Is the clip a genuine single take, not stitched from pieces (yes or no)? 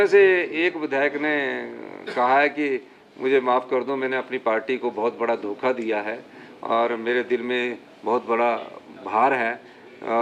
yes